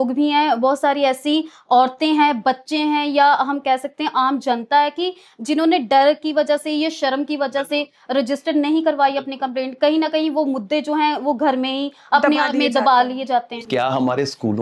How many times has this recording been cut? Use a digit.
1